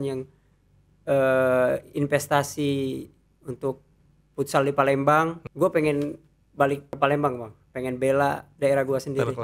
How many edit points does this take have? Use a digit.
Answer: 3